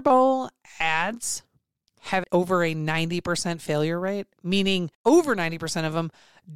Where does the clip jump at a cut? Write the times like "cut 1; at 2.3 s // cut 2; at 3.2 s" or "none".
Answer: cut 1; at 2.2 s // cut 2; at 4.9 s